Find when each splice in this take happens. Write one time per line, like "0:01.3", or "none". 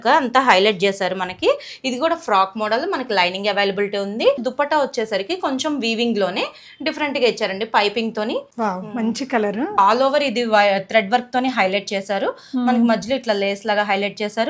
0:04.4
0:08.5
0:09.8